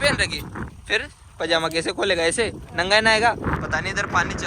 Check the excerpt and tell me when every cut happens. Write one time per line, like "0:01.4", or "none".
0:03.6